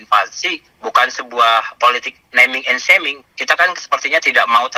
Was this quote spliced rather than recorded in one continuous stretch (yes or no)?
no